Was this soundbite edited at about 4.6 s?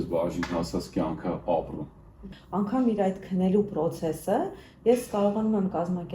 no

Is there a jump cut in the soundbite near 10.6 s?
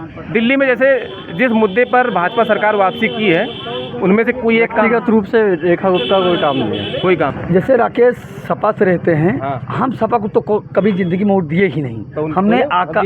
no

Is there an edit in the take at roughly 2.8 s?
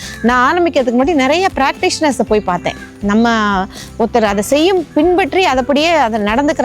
no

